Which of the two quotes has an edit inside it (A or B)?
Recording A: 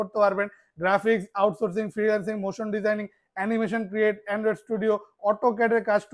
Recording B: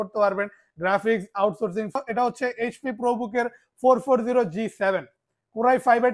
B